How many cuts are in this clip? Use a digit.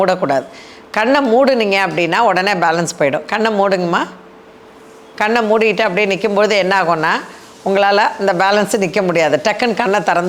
0